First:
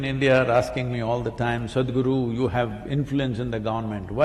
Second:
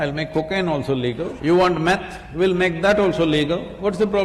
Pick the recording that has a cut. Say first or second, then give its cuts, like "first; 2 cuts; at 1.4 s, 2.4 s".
second; 1 cut; at 1.3 s